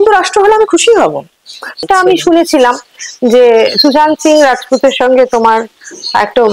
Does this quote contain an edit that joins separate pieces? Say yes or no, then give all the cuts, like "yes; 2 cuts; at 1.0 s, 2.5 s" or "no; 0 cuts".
yes; 1 cut; at 1.8 s